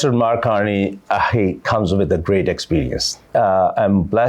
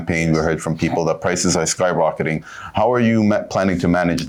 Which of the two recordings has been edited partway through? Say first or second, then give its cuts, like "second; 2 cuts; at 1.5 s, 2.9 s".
first; 1 cut; at 3.3 s